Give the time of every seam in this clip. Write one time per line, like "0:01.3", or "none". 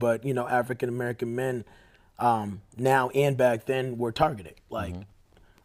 none